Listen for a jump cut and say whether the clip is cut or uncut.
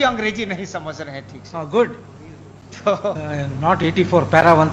uncut